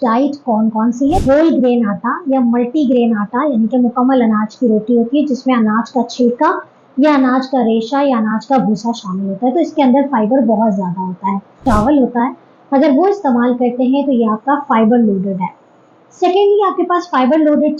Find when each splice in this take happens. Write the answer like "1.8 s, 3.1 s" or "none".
1.2 s, 11.6 s

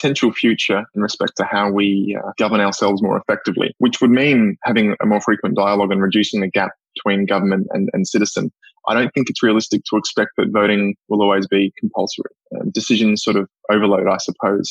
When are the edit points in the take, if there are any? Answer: 0.9 s, 2.2 s, 3.7 s

